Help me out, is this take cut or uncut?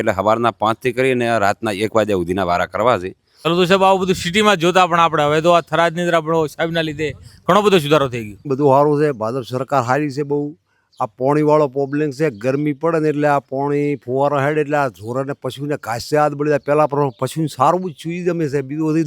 cut